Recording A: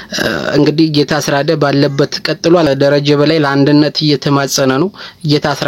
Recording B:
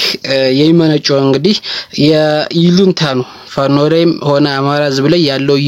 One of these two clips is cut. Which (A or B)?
A